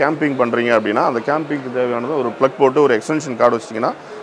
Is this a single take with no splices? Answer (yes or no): yes